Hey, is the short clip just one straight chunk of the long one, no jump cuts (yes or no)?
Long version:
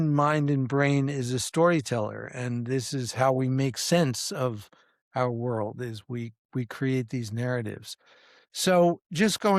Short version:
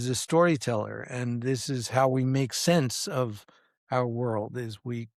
yes